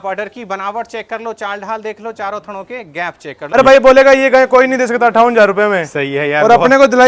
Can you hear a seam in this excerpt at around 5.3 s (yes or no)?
no